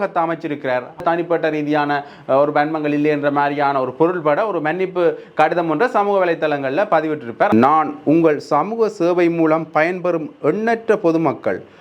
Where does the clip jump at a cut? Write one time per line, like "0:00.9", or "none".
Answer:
0:01.0
0:07.5